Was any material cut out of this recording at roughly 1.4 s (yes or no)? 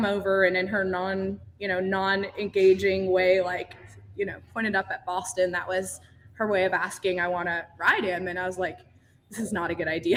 no